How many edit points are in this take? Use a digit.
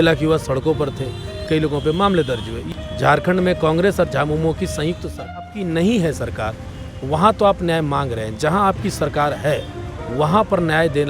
3